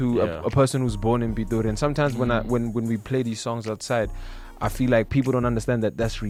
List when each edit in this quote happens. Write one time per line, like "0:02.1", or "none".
none